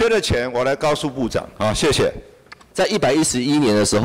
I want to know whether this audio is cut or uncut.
cut